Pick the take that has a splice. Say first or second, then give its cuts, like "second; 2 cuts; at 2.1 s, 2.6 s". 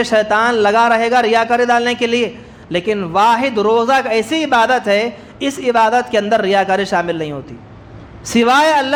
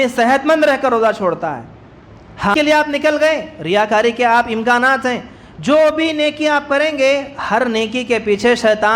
second; 1 cut; at 2.5 s